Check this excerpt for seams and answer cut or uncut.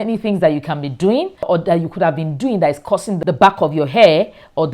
cut